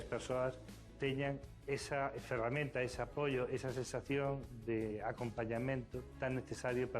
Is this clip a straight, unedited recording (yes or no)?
no